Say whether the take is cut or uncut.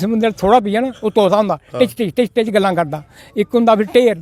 uncut